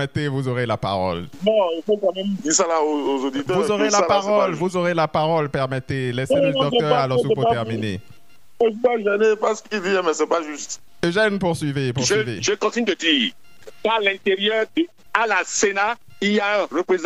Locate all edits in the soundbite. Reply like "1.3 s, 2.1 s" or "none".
none